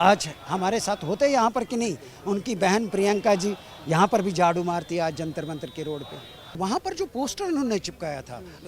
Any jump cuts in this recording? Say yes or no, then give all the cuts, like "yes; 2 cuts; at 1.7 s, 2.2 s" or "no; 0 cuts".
yes; 1 cut; at 6.6 s